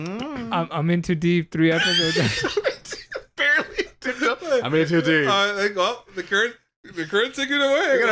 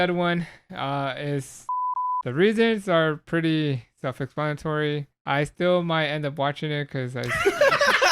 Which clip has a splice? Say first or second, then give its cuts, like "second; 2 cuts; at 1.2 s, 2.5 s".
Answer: second; 2 cuts; at 1.9 s, 5.1 s